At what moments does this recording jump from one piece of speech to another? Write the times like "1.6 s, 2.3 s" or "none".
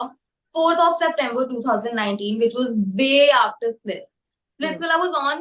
none